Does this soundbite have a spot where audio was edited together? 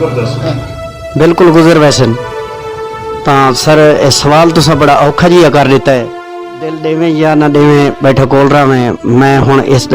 yes; 1 cut; at 6.7 s

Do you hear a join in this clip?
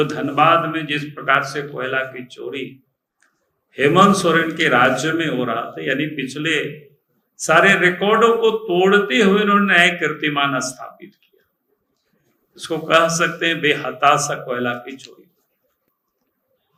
no; 0 cuts

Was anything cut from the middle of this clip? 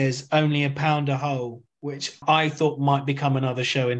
yes; 1 cut; at 2.2 s

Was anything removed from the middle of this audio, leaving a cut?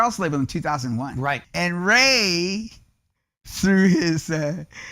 yes; 1 cut; at 1.5 s

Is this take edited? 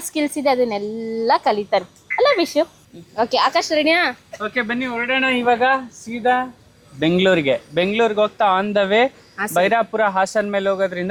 no; 0 cuts

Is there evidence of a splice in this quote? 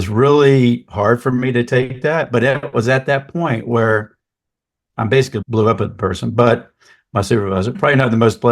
yes; 1 cut; at 5.4 s

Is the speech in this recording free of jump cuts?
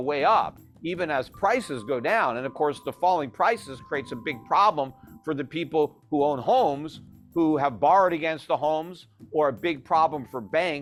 yes; 0 cuts

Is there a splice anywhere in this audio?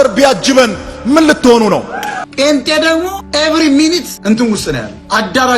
yes; 3 cuts; at 2.2 s, 3.2 s, 4.1 s

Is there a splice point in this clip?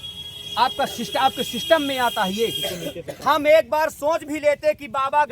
yes; 1 cut; at 3.2 s

